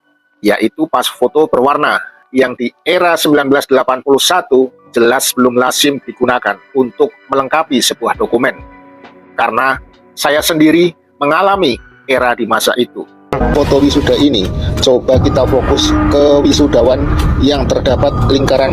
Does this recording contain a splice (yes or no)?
yes